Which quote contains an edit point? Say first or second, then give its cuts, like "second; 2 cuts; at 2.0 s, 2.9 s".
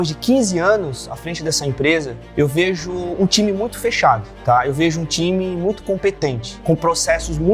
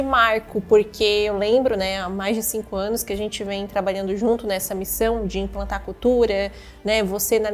first; 3 cuts; at 2.2 s, 4.3 s, 6.5 s